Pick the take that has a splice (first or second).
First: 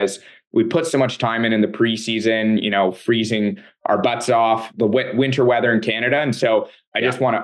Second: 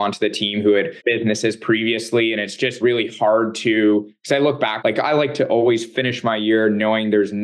second